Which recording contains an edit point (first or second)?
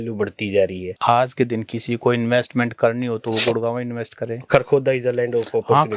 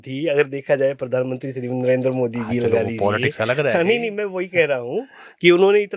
first